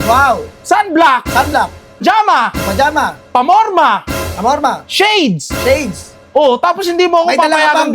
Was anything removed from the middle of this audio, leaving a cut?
yes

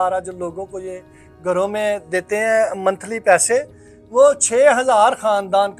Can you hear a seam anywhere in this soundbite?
no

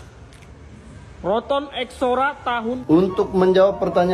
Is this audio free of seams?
no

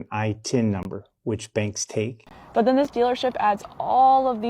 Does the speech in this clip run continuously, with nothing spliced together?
no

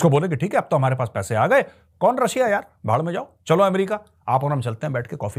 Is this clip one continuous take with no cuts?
yes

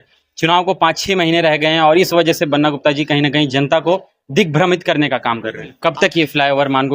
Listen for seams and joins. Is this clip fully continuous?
no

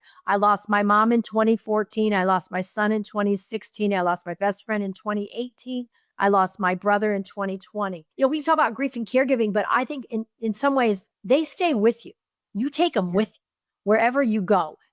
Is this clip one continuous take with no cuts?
no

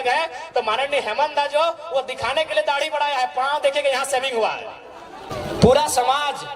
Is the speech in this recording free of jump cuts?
no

